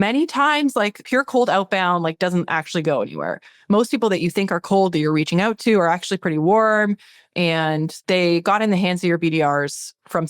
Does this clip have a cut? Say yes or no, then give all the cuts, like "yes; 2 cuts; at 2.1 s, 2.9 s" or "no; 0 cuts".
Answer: yes; 2 cuts; at 1.0 s, 7.9 s